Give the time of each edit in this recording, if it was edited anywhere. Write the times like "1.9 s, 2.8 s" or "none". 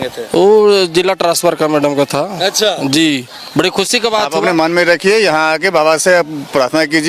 4.3 s